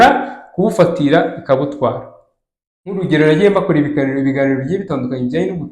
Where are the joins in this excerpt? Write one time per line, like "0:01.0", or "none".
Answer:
0:03.0